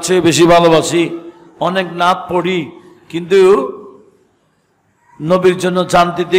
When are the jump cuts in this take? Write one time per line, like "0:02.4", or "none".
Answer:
none